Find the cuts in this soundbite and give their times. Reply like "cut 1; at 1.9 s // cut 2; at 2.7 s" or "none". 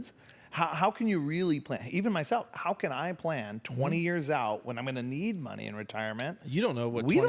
none